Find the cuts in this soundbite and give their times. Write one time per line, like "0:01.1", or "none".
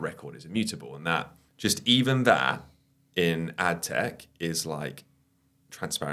0:01.4